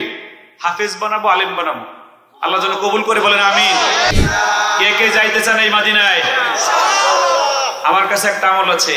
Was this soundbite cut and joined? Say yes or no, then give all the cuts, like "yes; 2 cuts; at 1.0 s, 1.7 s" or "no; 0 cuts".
yes; 1 cut; at 4.1 s